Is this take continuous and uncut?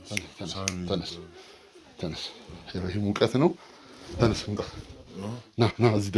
yes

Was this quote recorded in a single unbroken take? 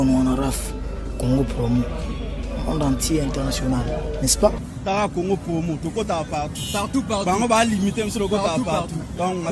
yes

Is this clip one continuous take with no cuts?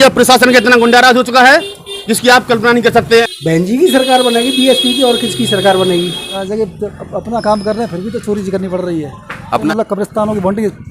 no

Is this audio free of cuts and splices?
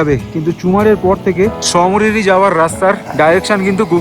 no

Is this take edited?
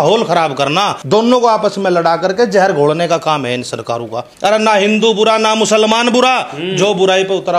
yes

